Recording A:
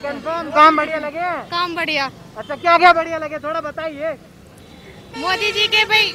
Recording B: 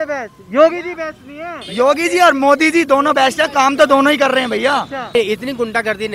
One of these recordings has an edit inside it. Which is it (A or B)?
B